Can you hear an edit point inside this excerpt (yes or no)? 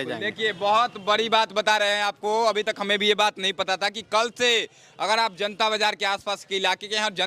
no